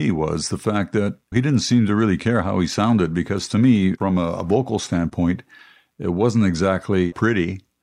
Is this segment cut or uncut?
uncut